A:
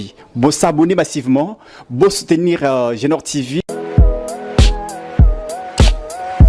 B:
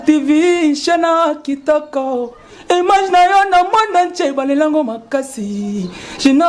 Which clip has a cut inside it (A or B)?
A